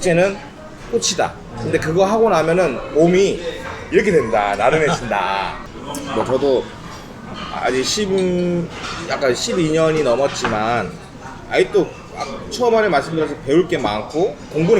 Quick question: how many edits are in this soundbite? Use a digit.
1